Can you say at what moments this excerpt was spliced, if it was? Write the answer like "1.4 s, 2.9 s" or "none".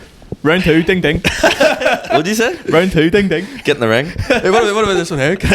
none